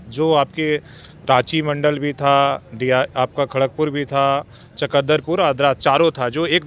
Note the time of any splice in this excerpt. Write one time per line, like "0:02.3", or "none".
none